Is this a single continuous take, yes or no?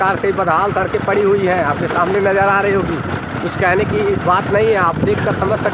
yes